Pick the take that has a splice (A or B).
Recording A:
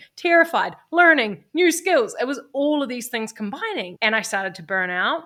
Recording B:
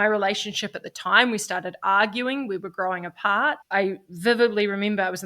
B